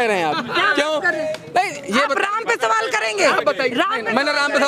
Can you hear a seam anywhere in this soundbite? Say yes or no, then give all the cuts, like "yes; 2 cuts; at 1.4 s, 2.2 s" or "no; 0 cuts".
no; 0 cuts